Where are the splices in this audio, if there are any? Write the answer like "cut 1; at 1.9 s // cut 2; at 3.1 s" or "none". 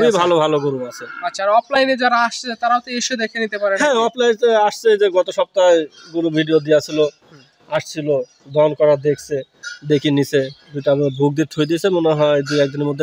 none